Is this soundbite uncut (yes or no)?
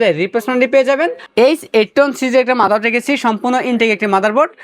no